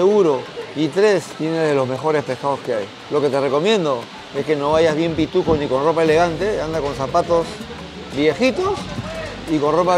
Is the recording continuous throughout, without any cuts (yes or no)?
no